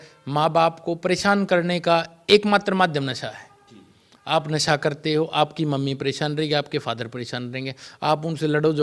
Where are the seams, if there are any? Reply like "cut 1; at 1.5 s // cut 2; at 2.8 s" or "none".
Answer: none